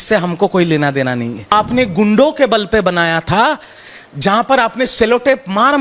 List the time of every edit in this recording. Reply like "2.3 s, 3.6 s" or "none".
1.5 s